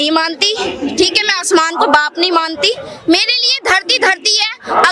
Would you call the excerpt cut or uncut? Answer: uncut